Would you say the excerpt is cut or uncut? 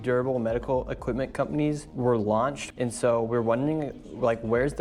cut